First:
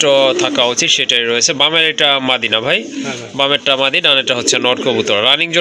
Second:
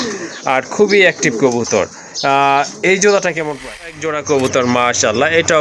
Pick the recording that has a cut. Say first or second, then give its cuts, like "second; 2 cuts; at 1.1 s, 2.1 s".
second; 1 cut; at 3.9 s